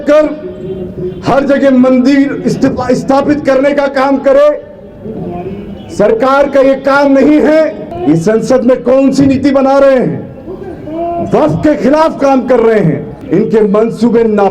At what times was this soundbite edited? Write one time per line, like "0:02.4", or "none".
0:07.9
0:13.1

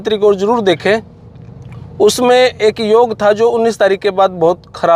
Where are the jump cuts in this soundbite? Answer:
none

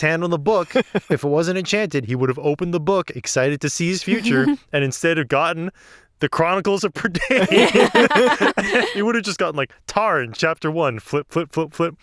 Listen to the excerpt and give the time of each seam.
0:08.9

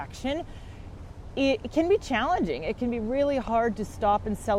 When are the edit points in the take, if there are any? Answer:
none

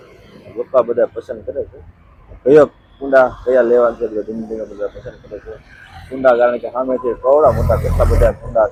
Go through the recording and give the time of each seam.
none

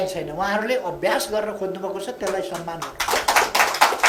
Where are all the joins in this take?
none

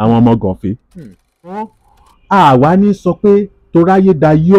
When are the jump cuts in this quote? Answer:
0:01.7

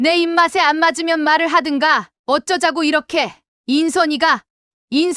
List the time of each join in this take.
0:03.5

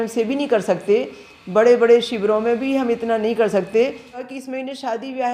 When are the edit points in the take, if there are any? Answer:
0:04.2

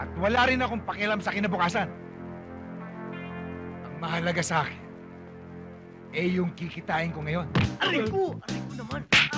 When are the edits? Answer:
0:07.5

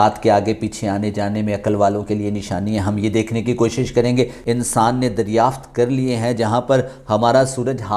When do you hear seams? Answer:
0:04.4

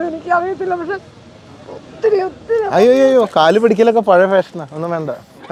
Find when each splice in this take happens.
none

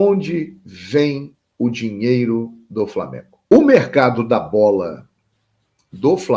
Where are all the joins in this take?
0:03.4

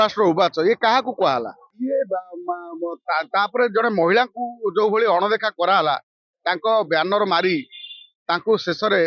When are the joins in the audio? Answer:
0:01.6

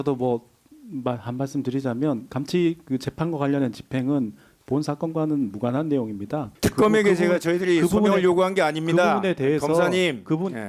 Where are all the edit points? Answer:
0:02.3
0:06.5

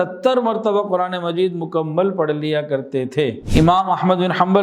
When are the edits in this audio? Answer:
0:03.4

